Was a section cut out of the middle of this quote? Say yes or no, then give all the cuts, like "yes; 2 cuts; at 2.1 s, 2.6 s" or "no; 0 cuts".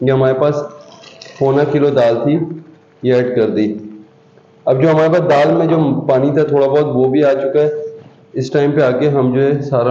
no; 0 cuts